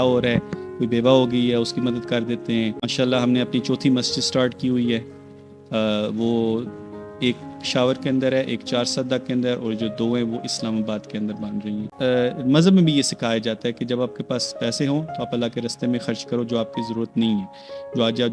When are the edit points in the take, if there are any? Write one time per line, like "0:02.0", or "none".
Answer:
0:02.9
0:11.9